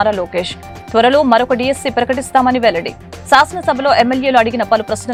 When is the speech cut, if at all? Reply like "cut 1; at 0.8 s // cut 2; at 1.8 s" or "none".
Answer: none